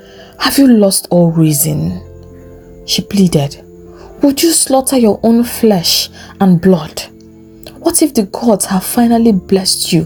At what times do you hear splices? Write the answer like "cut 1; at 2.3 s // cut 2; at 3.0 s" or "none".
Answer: none